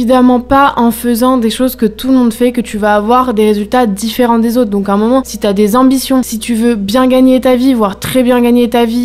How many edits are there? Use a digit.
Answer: 0